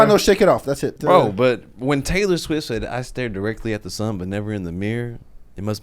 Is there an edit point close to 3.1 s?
no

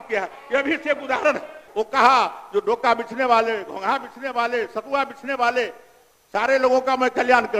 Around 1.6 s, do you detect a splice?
yes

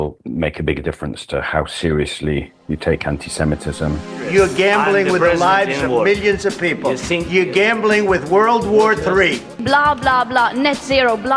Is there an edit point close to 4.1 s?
yes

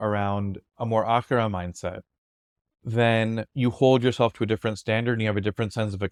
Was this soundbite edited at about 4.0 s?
no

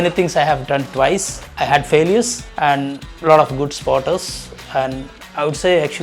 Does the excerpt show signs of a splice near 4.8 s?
no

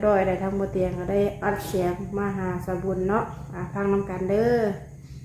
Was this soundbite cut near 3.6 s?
no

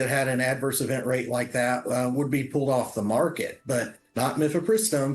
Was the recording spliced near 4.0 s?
yes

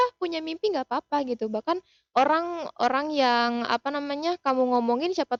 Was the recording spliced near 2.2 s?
no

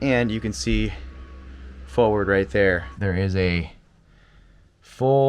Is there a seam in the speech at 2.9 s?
yes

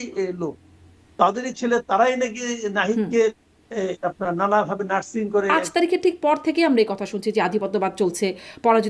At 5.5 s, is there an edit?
yes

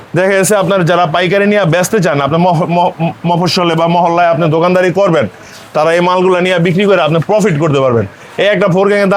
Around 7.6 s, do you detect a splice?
no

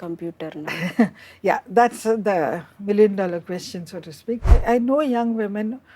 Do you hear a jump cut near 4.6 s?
yes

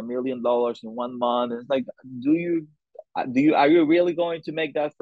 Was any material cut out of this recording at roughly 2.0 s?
no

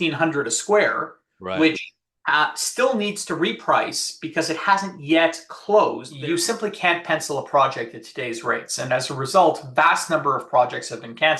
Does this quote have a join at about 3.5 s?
no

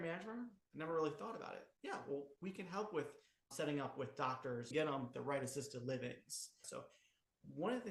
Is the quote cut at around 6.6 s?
yes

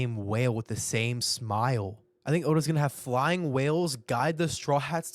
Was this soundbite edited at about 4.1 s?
no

